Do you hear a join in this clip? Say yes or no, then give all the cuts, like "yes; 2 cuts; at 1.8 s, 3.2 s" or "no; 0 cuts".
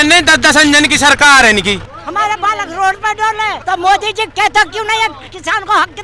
yes; 2 cuts; at 1.9 s, 3.6 s